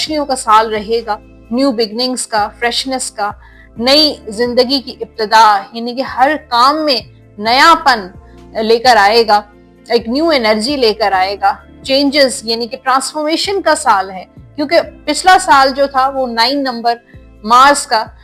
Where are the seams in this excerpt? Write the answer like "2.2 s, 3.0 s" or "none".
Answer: none